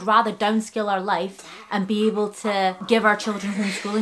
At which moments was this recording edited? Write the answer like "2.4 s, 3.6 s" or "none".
2.8 s